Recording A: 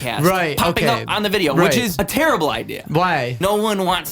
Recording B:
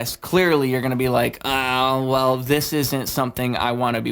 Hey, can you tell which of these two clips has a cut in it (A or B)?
A